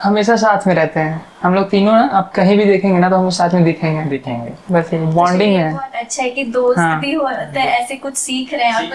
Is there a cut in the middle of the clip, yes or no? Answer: no